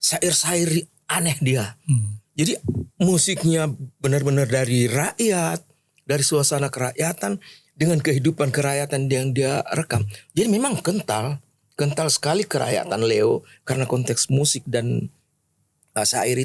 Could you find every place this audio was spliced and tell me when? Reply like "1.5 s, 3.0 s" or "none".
none